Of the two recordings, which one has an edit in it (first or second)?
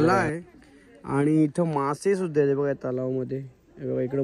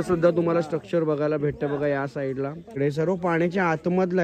second